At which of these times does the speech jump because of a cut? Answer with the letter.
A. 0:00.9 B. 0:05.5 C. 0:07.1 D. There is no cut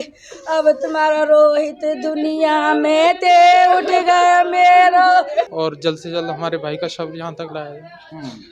B